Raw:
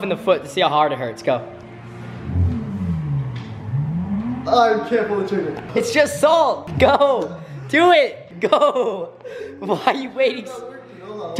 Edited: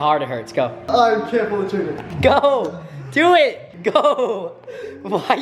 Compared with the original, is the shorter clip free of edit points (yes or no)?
no